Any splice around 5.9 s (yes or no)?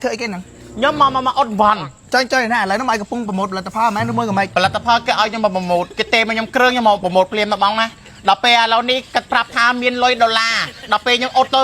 no